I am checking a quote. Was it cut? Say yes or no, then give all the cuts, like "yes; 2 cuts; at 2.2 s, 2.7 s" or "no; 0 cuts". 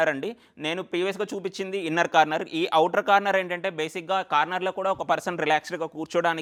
no; 0 cuts